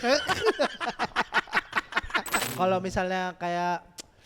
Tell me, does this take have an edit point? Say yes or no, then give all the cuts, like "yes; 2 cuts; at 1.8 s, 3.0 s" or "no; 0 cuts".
yes; 1 cut; at 2.4 s